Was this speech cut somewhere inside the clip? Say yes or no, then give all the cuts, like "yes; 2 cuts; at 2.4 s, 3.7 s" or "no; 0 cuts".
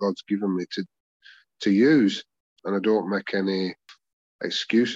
yes; 1 cut; at 2.5 s